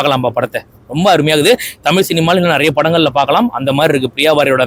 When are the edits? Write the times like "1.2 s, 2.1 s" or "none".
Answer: none